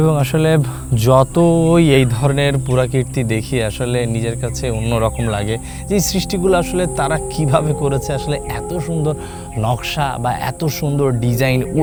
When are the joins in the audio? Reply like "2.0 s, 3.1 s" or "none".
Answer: none